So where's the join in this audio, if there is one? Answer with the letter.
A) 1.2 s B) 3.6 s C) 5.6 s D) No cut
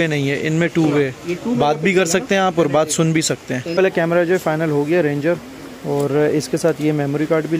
B